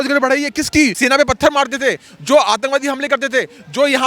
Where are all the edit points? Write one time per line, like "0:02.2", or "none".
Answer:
0:01.0